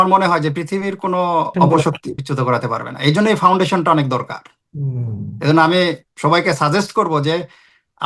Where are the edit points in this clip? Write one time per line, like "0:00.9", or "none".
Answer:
0:01.5
0:02.2